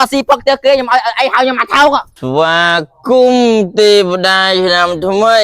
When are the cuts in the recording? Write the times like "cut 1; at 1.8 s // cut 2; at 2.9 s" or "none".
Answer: cut 1; at 2.2 s